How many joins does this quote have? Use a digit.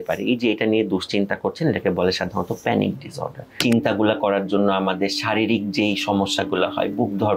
1